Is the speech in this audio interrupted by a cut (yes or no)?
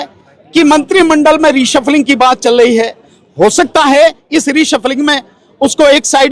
no